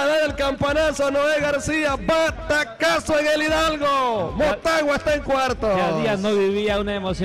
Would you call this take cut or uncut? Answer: uncut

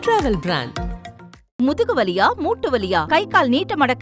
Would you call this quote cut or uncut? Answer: uncut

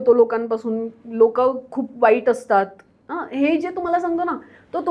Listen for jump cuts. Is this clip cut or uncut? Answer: uncut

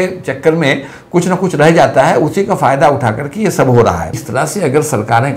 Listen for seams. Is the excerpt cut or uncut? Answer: cut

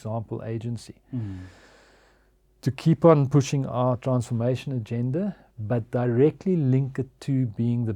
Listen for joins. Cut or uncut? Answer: uncut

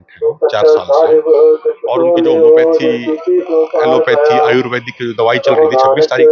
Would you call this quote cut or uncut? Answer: uncut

